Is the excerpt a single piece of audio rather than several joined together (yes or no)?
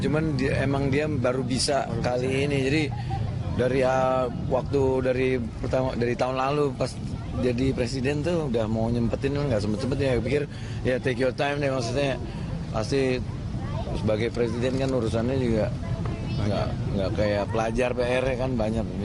yes